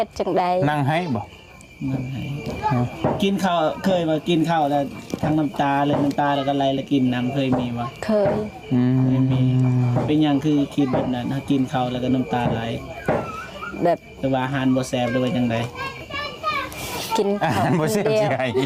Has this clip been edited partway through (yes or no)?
no